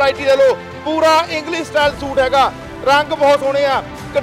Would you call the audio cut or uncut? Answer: uncut